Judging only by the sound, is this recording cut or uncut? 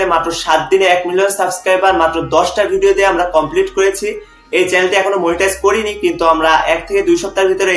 uncut